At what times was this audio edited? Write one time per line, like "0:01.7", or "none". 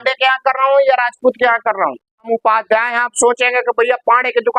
0:02.3